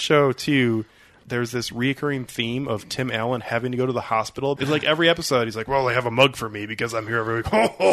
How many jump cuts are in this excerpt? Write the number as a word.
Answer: two